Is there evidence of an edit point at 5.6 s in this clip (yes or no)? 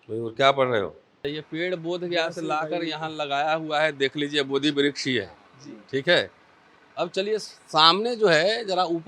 no